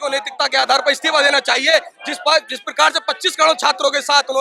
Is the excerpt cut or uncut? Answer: uncut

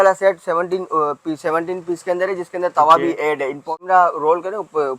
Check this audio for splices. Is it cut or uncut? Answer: cut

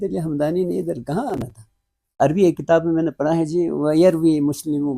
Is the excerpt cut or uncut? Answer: cut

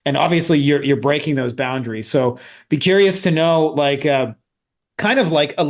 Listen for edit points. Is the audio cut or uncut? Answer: uncut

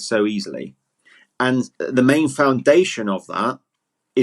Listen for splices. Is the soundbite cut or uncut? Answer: cut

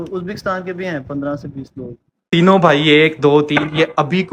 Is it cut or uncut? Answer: cut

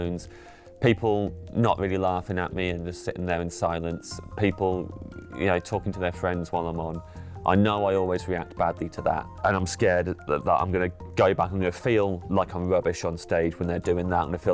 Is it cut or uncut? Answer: uncut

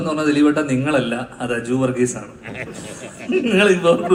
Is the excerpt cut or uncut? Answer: uncut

